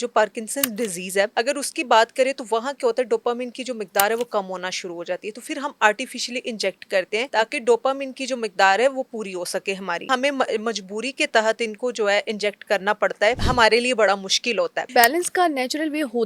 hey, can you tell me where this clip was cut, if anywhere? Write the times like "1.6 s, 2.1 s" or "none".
1.3 s, 7.3 s, 10.1 s, 13.5 s, 14.9 s